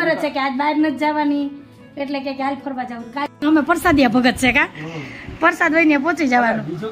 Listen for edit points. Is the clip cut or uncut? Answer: cut